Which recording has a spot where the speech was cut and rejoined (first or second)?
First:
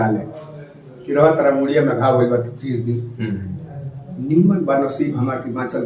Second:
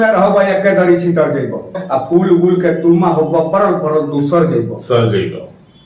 second